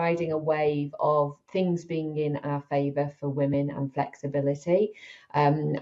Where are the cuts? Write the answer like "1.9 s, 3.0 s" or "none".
1.4 s